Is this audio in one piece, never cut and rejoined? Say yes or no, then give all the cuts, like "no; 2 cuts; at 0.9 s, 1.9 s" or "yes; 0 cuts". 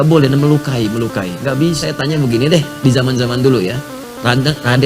no; 1 cut; at 1.9 s